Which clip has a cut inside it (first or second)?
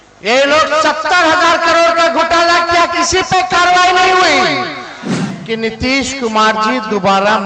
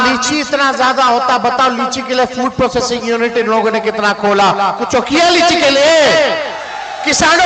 first